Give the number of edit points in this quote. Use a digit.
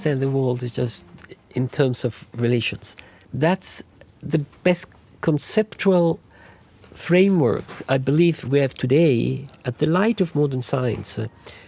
0